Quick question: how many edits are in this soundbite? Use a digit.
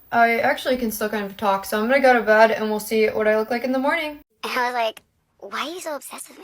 1